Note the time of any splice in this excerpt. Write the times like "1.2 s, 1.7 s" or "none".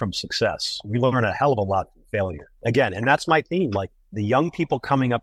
none